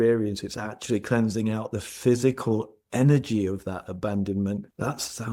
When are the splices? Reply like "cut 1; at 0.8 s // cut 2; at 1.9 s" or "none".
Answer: none